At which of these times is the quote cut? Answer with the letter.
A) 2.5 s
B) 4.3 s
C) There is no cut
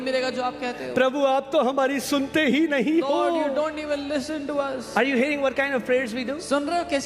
C